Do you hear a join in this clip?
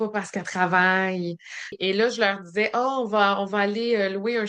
yes; 1 cut; at 1.7 s

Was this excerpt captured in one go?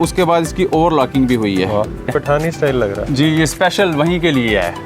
no; 1 cut; at 2.1 s

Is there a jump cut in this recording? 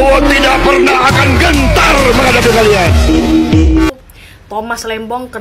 yes; 1 cut; at 3.9 s

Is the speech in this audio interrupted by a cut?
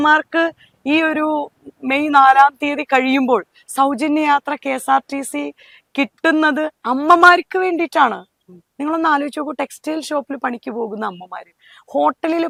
no; 0 cuts

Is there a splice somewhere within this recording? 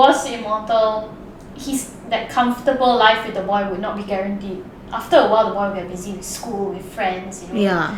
no; 0 cuts

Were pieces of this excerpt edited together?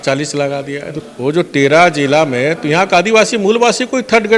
yes; 1 cut; at 1.0 s

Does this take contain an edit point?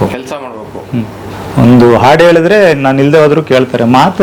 no; 0 cuts

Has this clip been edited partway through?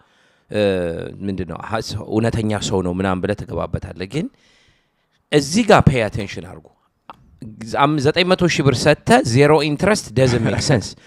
no; 0 cuts

